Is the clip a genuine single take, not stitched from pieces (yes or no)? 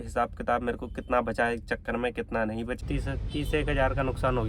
no